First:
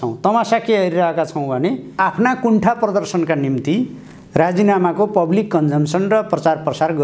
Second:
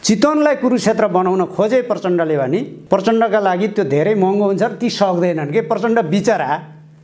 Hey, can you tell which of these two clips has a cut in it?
first; 1 cut; at 1.9 s

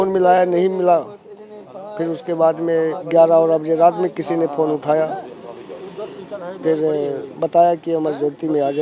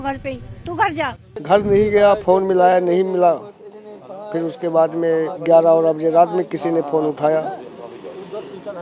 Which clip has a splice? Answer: second; 1 cut; at 1.4 s

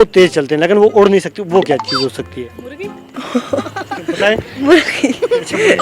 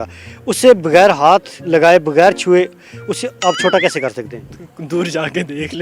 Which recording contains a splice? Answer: first; 1 cut; at 3.2 s

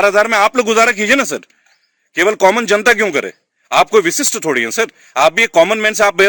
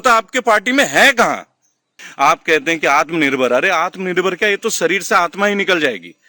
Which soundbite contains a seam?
second; 1 cut; at 2.0 s

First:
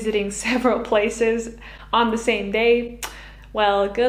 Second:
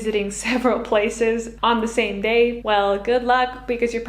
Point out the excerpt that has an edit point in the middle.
second; 2 cuts; at 1.5 s, 2.6 s

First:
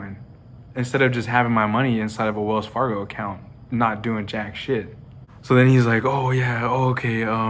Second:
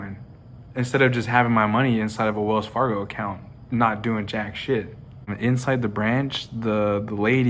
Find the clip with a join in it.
second; 1 cut; at 5.3 s

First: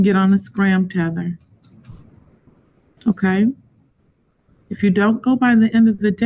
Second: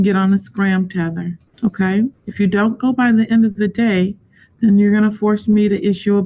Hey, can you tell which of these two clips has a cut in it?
second; 2 cuts; at 1.4 s, 2.2 s

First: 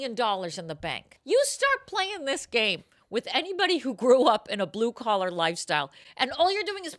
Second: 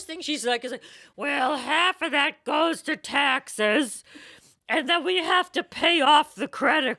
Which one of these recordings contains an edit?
first; 1 cut; at 1.1 s

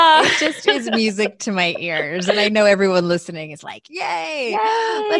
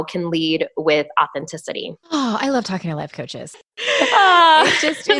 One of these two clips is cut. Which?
second; 2 cuts; at 1.9 s, 3.3 s

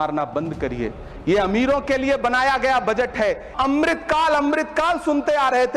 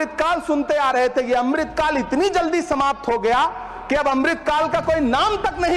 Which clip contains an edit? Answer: first; 1 cut; at 3.5 s

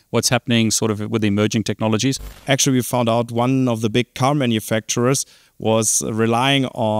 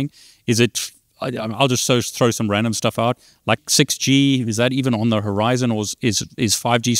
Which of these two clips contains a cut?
first; 1 cut; at 2.3 s

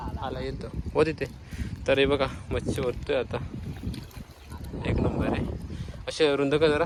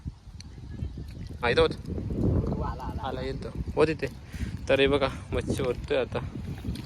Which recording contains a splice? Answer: second; 1 cut; at 1.4 s

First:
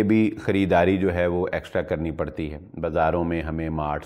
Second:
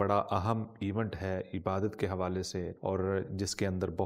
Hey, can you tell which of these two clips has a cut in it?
second; 1 cut; at 2.7 s

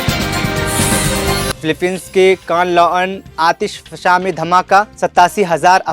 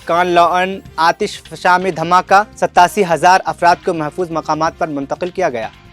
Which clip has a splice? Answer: first; 1 cut; at 1.5 s

